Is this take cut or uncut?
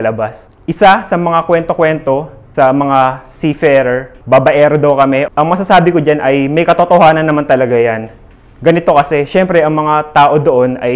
cut